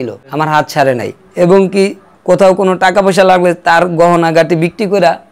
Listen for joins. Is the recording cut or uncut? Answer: cut